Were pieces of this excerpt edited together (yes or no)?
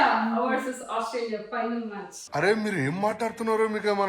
no